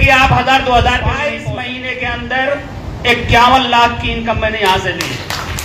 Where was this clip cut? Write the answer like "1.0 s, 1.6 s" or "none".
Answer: 1.3 s